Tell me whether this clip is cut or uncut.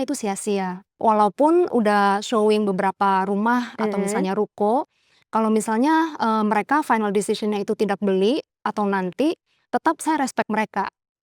cut